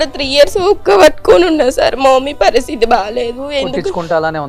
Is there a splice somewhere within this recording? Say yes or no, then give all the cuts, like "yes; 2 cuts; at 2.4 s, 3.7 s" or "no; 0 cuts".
no; 0 cuts